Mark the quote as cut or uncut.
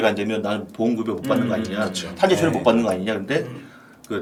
uncut